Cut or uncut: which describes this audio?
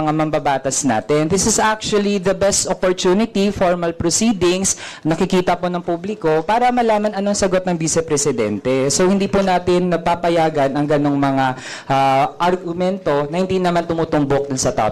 uncut